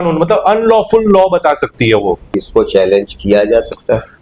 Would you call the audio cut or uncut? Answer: cut